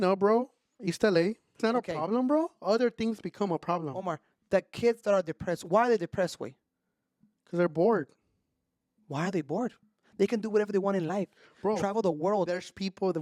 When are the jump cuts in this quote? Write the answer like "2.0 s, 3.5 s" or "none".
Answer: 1.6 s